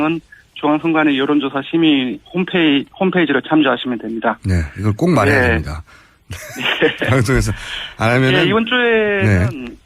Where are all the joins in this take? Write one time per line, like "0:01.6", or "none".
0:06.6